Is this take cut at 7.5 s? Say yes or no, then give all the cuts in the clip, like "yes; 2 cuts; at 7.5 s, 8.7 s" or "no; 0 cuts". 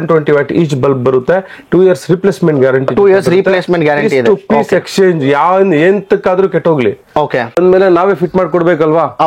yes; 1 cut; at 7.5 s